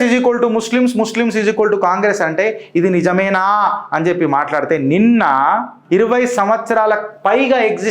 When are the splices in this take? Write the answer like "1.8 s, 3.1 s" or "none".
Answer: 5.8 s